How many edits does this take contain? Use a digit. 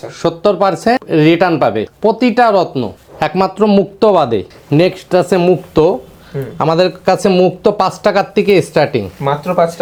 0